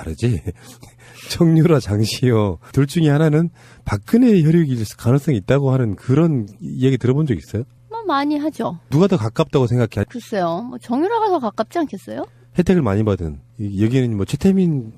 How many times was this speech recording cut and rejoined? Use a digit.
0